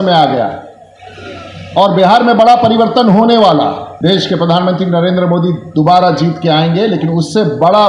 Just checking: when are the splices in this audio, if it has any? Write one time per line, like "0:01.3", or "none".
0:03.9